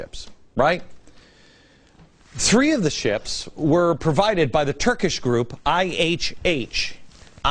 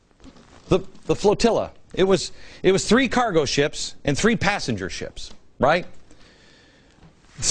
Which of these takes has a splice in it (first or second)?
second